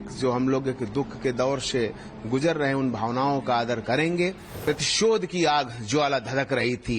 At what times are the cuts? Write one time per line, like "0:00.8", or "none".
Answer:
0:04.5